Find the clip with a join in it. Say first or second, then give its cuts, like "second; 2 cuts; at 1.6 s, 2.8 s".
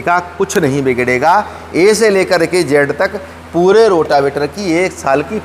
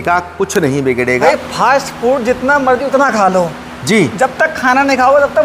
second; 1 cut; at 1.2 s